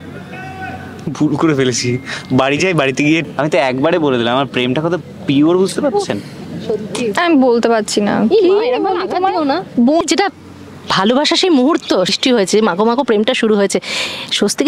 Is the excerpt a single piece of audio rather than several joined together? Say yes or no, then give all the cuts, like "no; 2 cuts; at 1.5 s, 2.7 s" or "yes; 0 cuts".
no; 3 cuts; at 3.2 s, 10.0 s, 12.1 s